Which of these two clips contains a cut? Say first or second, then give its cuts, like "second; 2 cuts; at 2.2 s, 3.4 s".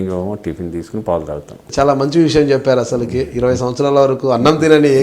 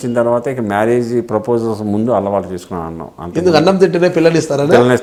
first; 1 cut; at 1.6 s